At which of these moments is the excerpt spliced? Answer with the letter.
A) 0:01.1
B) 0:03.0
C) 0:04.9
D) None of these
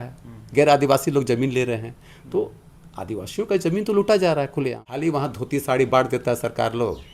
C